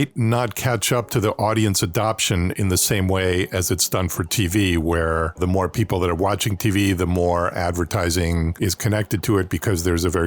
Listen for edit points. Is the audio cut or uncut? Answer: cut